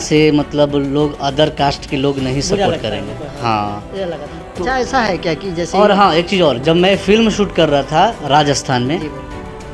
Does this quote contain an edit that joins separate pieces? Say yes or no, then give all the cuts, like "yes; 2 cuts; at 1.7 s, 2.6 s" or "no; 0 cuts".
no; 0 cuts